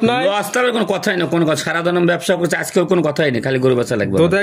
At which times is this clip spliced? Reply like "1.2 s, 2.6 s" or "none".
none